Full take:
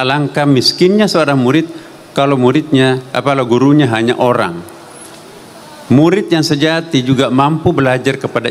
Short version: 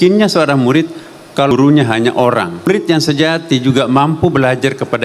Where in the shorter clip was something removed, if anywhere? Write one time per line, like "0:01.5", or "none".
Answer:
0:01.5
0:02.7